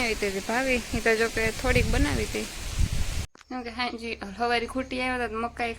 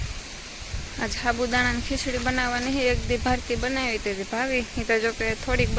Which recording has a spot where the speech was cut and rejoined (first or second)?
first